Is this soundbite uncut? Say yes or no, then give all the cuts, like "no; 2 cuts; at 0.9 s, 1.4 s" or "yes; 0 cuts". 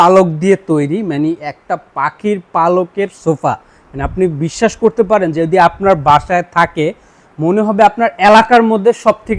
yes; 0 cuts